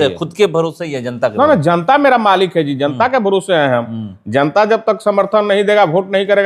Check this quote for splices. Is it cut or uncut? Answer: uncut